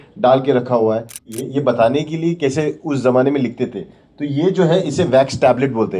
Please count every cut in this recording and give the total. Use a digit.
1